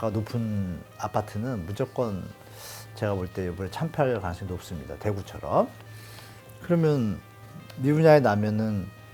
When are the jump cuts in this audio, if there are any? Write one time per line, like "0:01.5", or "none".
none